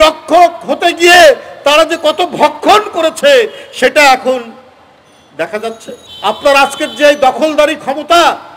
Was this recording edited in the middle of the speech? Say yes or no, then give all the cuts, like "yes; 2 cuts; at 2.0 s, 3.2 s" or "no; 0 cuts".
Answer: yes; 1 cut; at 6.1 s